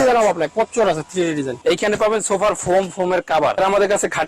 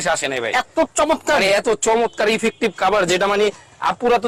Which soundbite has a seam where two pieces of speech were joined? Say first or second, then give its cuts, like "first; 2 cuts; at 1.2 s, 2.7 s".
first; 2 cuts; at 1.5 s, 3.6 s